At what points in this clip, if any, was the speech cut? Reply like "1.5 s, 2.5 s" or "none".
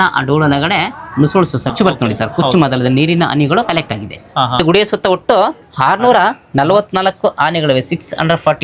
1.7 s, 4.6 s